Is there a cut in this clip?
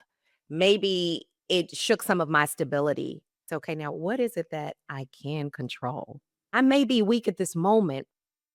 yes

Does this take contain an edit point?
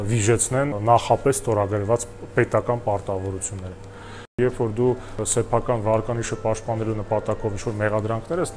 yes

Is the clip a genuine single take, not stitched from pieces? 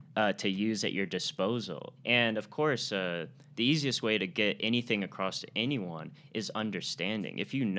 no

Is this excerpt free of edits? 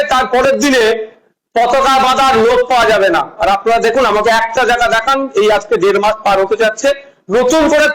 yes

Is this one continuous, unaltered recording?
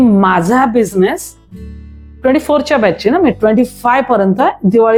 yes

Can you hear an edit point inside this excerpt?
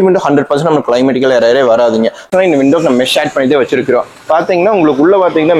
yes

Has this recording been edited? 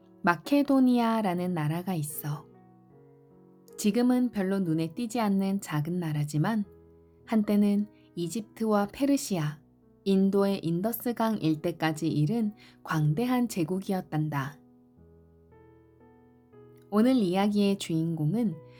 no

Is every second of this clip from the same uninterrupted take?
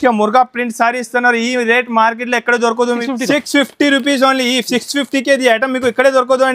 no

